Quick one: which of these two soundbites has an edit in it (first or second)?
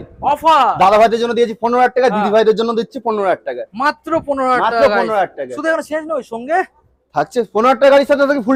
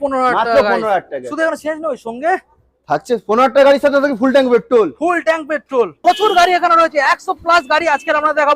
second